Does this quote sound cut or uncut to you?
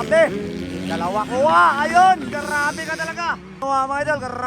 cut